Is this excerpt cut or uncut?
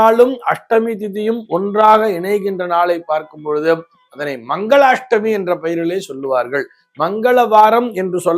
uncut